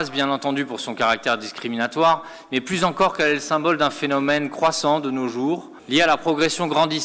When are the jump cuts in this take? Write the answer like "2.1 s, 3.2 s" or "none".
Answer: 5.7 s